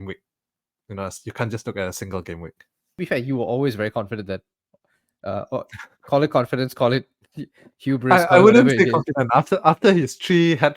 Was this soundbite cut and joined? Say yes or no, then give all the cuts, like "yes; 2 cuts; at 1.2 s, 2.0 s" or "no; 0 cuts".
yes; 1 cut; at 2.8 s